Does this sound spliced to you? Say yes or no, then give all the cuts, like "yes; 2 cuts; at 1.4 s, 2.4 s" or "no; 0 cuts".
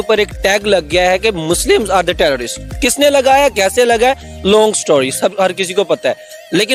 no; 0 cuts